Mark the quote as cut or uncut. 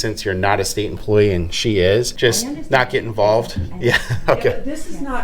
cut